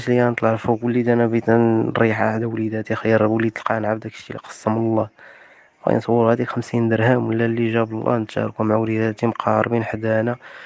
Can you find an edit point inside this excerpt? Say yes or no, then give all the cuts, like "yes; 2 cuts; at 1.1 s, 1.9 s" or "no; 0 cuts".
no; 0 cuts